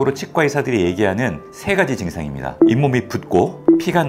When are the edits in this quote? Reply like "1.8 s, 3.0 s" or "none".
2.5 s